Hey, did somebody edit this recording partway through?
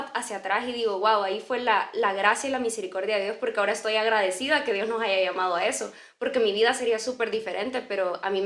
no; 0 cuts

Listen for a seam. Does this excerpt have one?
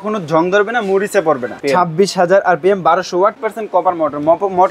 yes; 2 cuts; at 1.6 s, 3.4 s

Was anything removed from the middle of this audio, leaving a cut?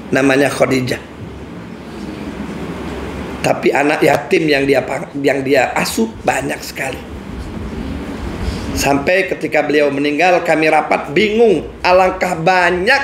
no; 0 cuts

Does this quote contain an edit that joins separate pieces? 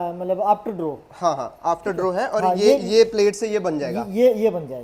no; 0 cuts

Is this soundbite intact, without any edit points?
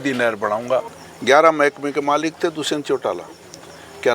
no; 1 cut; at 0.9 s

